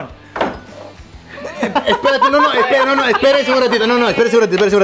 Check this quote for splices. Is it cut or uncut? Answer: uncut